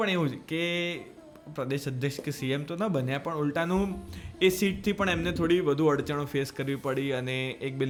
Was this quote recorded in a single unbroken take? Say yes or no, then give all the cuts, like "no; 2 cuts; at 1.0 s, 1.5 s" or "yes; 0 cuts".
yes; 0 cuts